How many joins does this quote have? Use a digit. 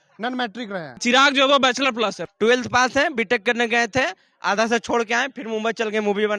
2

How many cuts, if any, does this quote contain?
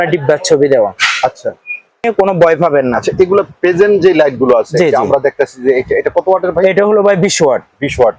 1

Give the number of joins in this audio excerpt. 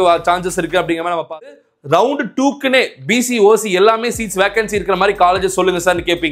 1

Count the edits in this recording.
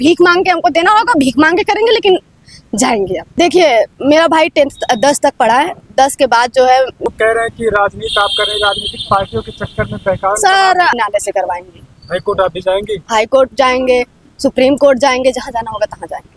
3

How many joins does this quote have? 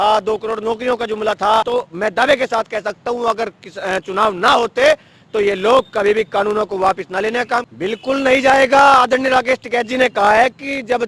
2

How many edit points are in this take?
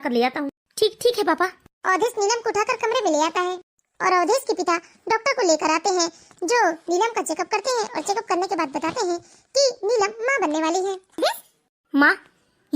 1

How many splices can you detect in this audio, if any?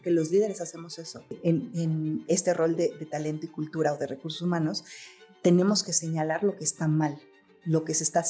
1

